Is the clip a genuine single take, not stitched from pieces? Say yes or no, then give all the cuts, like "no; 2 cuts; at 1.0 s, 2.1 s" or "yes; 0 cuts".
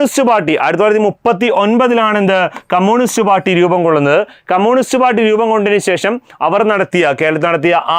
yes; 0 cuts